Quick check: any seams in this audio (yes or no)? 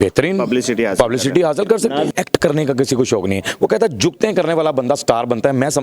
yes